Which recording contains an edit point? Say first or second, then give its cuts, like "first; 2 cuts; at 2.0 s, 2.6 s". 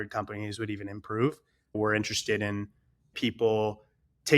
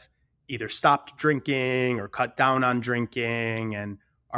first; 2 cuts; at 1.8 s, 3.1 s